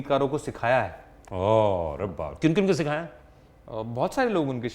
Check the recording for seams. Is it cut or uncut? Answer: uncut